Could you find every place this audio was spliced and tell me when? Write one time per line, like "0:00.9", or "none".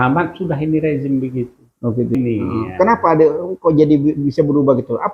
0:02.1